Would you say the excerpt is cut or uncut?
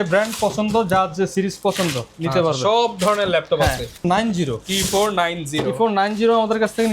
cut